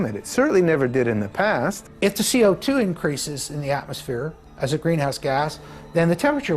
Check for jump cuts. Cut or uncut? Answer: cut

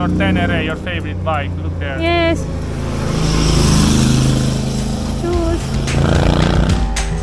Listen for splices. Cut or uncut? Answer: uncut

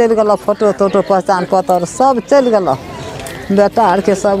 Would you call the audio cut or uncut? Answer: uncut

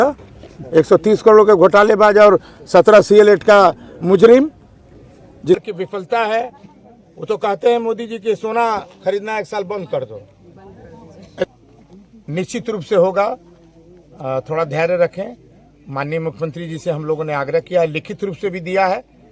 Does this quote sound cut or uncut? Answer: cut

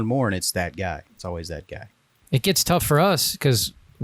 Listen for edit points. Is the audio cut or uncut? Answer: cut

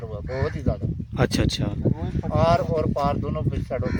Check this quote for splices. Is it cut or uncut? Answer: uncut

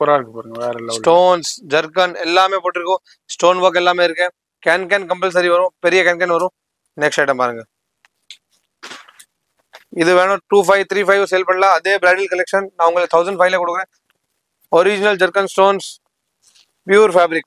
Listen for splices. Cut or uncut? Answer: uncut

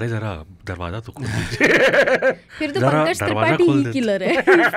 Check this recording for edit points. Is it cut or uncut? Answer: uncut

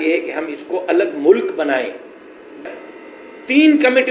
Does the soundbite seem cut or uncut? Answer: cut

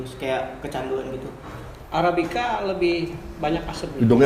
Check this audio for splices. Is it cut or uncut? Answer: cut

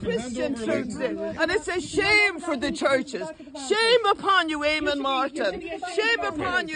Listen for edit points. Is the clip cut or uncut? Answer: uncut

